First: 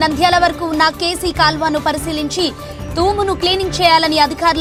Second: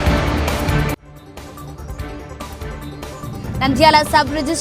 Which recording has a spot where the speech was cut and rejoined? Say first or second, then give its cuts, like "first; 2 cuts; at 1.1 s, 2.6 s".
second; 2 cuts; at 2.5 s, 3.6 s